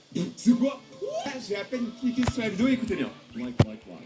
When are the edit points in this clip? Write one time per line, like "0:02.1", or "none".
0:01.3